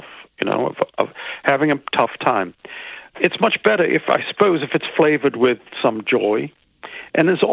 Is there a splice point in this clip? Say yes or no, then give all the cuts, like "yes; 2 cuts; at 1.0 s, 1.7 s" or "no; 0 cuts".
yes; 1 cut; at 3.1 s